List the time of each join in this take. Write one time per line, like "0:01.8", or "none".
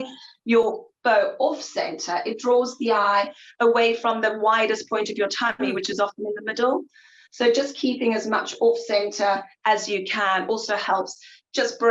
none